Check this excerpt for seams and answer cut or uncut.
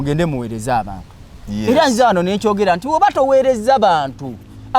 uncut